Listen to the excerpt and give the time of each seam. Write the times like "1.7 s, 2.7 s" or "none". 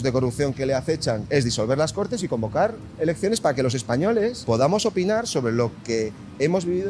1.2 s, 4.4 s